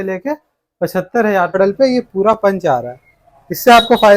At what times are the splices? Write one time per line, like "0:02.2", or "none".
0:01.6